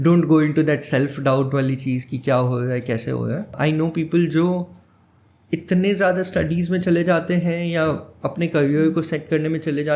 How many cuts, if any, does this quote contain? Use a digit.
1